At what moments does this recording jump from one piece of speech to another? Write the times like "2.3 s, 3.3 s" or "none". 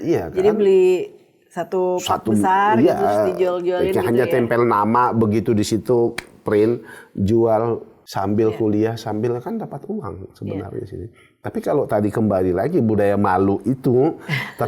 8.0 s